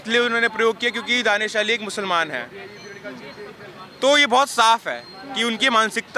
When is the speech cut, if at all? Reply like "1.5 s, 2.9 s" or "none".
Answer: none

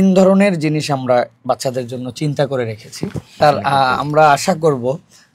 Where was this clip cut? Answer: 3.4 s

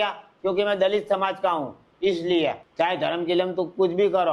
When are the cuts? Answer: 2.6 s

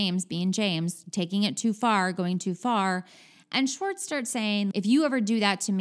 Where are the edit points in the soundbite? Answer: 4.7 s

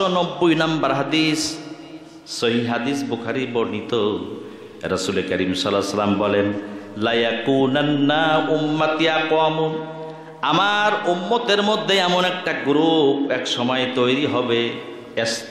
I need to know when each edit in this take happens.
none

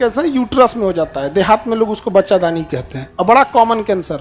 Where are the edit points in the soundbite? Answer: none

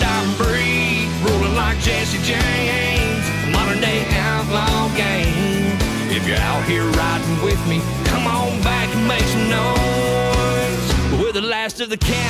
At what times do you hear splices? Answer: none

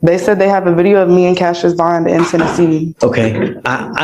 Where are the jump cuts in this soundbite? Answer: 2.9 s

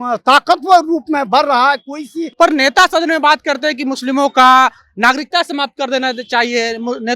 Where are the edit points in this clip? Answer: 2.2 s

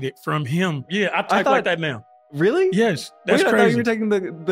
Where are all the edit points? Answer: 0.9 s

